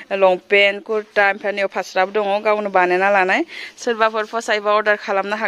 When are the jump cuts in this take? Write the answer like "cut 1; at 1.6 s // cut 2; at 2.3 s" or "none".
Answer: none